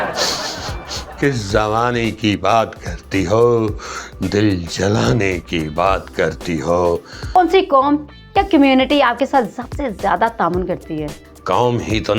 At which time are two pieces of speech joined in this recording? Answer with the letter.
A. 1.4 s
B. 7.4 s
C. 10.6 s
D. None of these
B